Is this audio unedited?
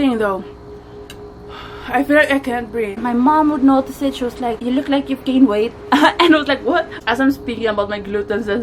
no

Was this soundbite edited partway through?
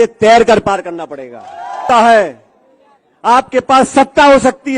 yes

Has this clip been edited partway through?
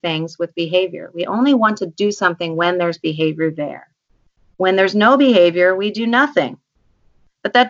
no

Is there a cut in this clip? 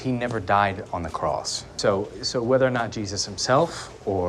yes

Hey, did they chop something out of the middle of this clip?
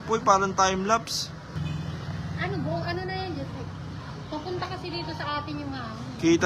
yes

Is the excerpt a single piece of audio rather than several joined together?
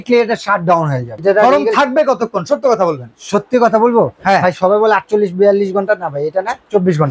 no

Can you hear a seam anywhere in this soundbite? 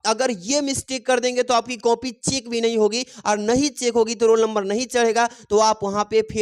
no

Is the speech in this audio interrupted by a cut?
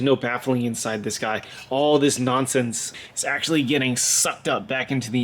yes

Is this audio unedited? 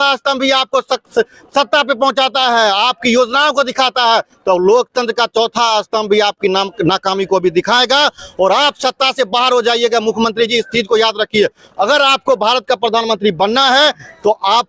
yes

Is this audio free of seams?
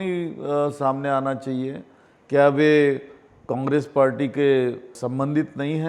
no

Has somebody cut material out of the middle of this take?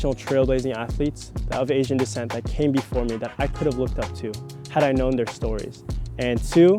no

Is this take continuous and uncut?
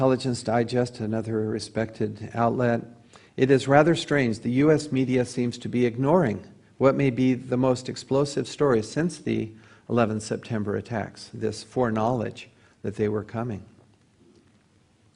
yes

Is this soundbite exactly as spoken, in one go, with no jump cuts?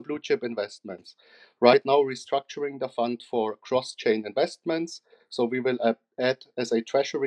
yes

